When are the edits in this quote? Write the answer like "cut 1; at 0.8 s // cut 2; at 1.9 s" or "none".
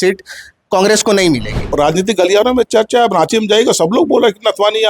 cut 1; at 1.7 s